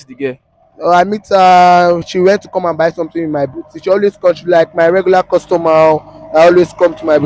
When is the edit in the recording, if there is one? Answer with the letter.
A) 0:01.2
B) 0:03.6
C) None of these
C